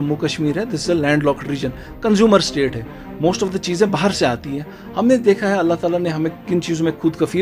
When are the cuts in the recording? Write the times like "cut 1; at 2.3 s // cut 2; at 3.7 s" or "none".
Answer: none